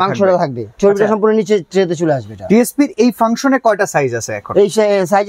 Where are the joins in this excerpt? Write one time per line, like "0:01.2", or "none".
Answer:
none